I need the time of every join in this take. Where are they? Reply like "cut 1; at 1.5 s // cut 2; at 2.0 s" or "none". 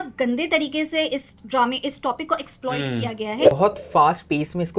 cut 1; at 3.5 s